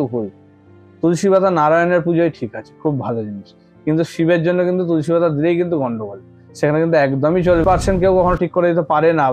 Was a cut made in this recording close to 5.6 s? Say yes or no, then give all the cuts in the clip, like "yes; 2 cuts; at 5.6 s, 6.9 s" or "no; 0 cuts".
no; 1 cut; at 7.6 s